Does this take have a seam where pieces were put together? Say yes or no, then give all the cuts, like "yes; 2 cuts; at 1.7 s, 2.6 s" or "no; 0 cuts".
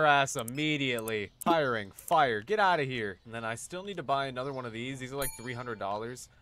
yes; 2 cuts; at 1.2 s, 3.2 s